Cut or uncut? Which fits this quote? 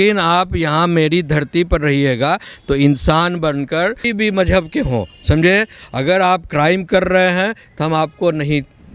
cut